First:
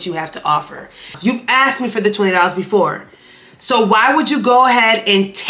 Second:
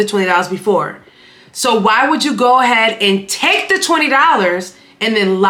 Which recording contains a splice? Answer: first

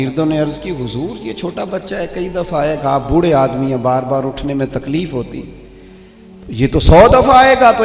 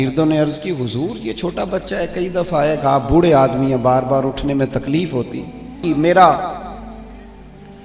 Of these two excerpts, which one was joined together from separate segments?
second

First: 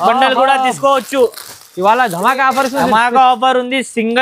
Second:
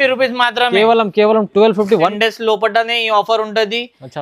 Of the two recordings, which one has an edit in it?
second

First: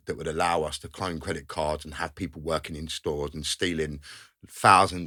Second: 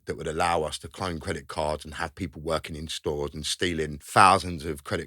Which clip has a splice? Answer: second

